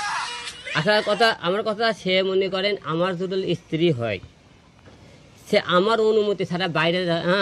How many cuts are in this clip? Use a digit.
0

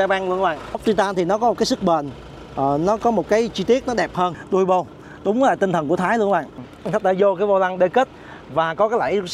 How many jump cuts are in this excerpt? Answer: 3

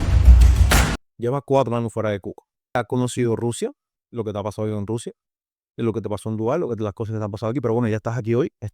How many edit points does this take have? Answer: 2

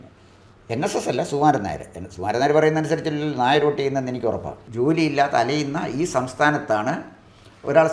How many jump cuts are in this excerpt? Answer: 1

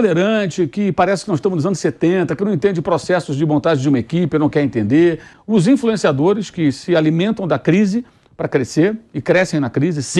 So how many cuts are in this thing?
1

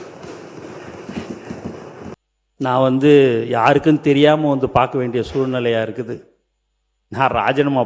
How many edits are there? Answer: 1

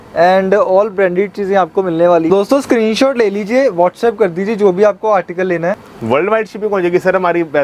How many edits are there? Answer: 2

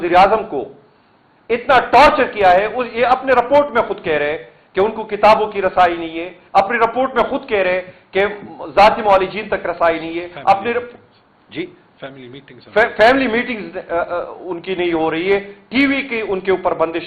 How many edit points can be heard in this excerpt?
0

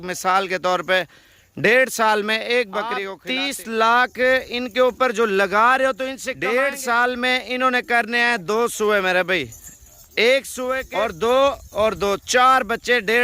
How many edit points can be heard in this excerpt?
3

